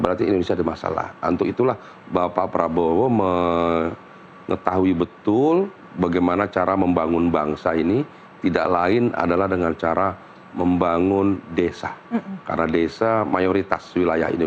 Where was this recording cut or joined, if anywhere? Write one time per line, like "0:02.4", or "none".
none